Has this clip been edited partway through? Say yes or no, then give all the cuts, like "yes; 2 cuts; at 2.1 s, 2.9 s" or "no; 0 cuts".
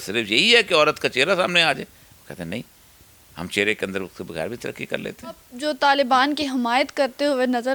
yes; 1 cut; at 5.5 s